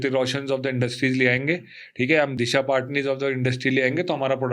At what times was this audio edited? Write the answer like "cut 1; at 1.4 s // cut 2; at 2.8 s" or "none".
cut 1; at 2.3 s